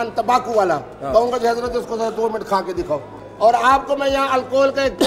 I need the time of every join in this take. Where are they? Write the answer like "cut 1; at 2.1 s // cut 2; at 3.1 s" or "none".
cut 1; at 3.2 s